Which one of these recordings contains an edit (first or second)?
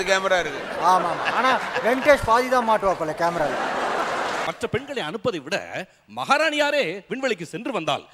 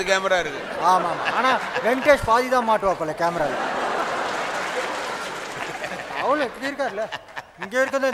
first